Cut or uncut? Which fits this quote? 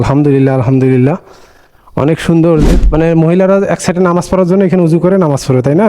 cut